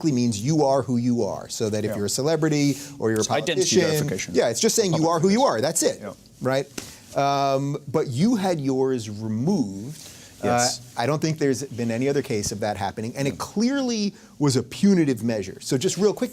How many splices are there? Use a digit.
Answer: 1